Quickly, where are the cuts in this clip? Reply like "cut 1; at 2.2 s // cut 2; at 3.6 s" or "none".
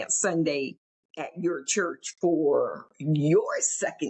none